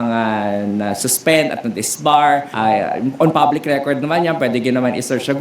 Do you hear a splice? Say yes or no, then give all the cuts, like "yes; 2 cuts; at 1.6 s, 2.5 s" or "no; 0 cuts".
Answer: yes; 1 cut; at 2.5 s